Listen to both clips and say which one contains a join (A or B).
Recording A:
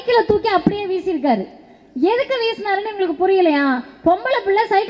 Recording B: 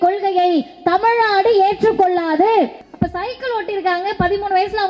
B